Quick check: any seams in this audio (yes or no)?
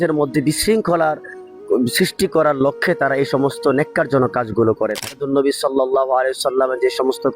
yes